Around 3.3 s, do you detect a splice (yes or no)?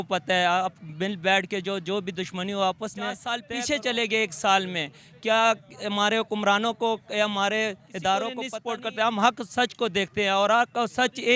yes